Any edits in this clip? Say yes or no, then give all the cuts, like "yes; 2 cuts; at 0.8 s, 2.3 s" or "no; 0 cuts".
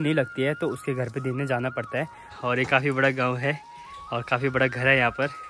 yes; 1 cut; at 2.3 s